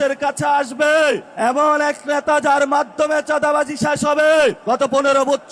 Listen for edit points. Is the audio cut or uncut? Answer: cut